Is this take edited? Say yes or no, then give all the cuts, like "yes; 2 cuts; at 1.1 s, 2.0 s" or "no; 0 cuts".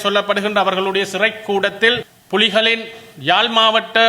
yes; 1 cut; at 2.1 s